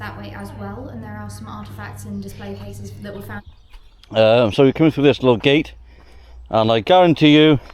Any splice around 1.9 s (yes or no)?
no